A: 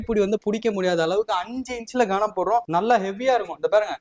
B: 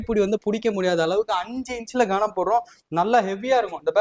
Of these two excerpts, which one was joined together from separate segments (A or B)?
A